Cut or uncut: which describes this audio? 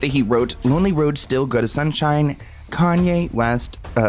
uncut